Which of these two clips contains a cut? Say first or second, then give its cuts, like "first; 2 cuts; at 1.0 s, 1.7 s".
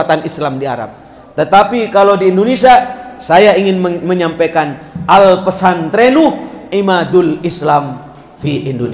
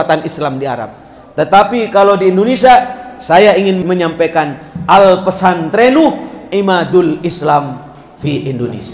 second; 1 cut; at 3.8 s